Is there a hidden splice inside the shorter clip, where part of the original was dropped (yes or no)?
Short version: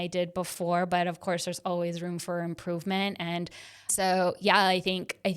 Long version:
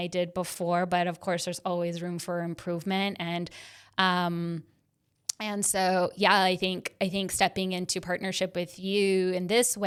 yes